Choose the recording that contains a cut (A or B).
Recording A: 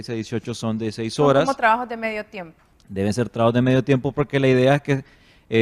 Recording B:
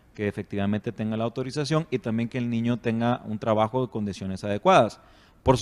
A